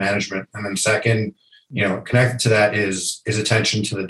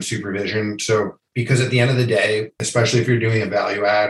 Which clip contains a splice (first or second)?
second